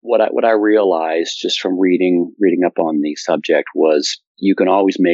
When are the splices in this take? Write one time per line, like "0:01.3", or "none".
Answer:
none